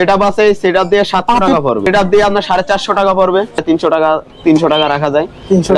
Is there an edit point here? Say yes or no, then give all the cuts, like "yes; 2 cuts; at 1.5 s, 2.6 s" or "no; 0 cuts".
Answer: yes; 2 cuts; at 1.8 s, 3.6 s